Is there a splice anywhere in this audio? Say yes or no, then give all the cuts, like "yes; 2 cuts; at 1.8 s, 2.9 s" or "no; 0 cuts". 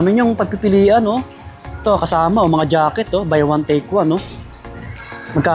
no; 0 cuts